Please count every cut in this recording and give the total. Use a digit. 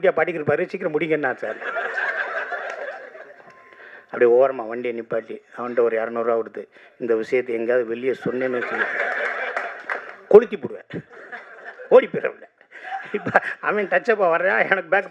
0